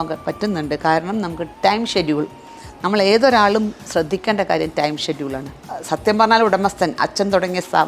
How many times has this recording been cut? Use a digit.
1